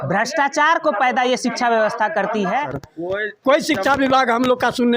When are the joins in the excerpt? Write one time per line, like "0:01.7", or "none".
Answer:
0:02.7